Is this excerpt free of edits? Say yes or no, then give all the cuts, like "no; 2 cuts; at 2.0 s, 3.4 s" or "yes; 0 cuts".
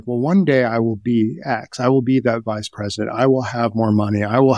yes; 0 cuts